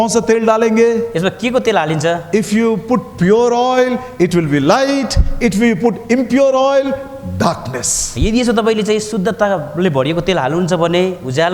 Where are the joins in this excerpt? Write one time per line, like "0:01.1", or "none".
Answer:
none